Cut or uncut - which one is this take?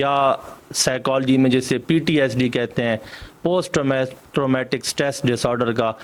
uncut